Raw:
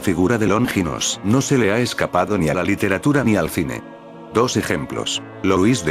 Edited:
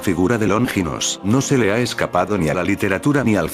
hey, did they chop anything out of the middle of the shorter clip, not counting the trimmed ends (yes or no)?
no